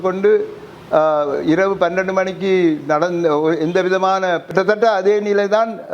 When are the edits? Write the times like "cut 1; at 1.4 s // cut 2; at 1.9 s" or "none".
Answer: cut 1; at 4.5 s

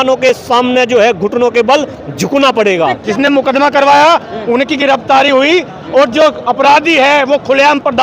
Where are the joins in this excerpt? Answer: cut 1; at 3.0 s

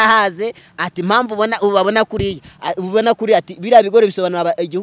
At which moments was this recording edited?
none

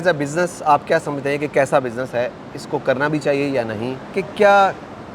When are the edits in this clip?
cut 1; at 4.2 s

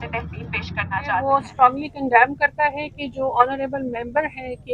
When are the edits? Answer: cut 1; at 1.2 s

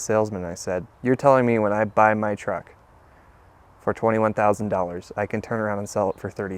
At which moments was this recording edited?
cut 1; at 0.9 s

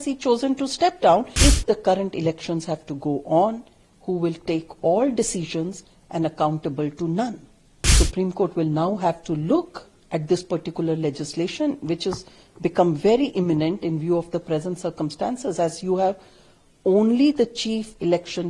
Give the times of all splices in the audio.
cut 1; at 1.3 s // cut 2; at 7.9 s

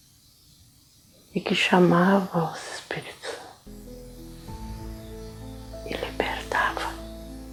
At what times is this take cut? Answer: none

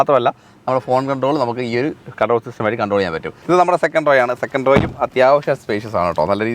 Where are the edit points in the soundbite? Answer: cut 1; at 3.4 s

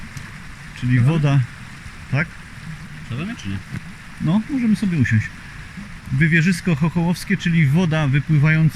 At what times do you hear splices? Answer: none

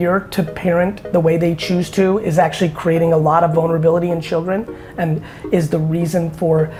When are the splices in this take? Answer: none

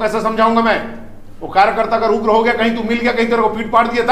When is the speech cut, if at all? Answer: none

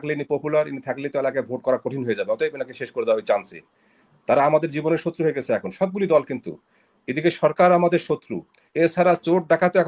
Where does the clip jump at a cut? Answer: none

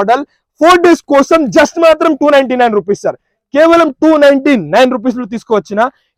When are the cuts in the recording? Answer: none

